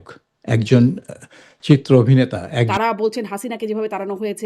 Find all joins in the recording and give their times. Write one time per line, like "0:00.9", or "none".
0:02.7